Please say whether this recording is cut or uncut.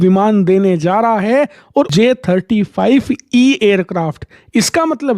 cut